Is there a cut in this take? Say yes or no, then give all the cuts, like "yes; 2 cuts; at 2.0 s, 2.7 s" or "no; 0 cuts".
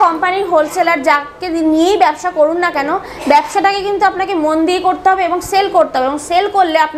no; 0 cuts